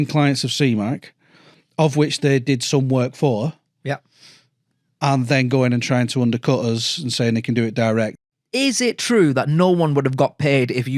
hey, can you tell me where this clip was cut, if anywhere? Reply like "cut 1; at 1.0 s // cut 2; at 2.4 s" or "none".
cut 1; at 8.3 s

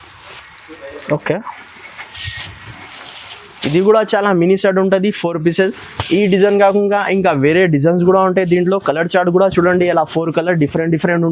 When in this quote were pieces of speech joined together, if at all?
none

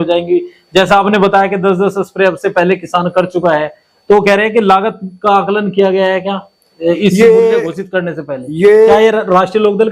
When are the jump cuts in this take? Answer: cut 1; at 8.9 s

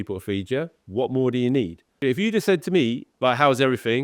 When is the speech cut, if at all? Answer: cut 1; at 1.9 s // cut 2; at 3.1 s

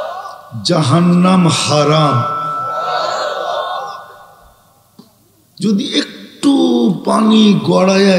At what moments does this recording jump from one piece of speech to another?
none

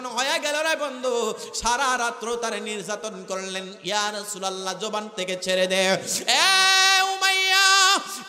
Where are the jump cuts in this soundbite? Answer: none

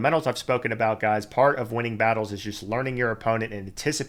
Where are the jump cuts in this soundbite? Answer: none

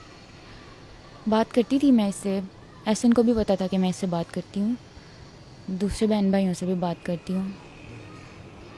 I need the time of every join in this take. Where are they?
none

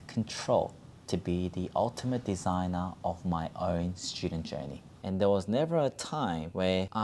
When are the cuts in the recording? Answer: cut 1; at 5.0 s

